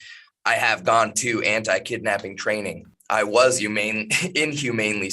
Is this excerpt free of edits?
no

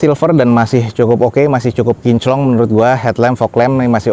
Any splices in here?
no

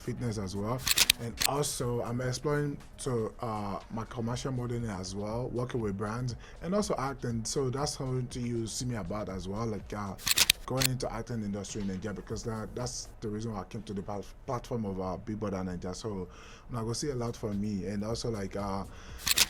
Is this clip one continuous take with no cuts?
yes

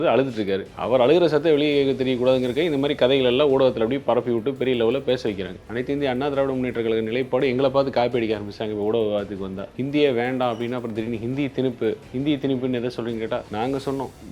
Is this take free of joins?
no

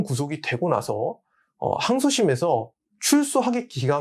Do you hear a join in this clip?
no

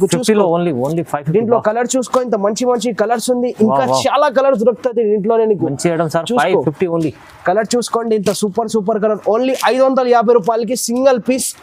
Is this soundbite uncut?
yes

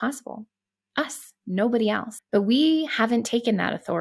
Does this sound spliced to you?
yes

